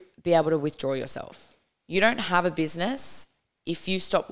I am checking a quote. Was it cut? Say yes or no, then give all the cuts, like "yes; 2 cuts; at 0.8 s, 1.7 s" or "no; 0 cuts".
no; 0 cuts